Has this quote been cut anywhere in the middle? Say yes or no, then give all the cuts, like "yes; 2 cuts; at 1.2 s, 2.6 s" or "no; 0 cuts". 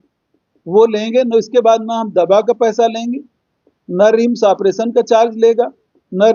no; 0 cuts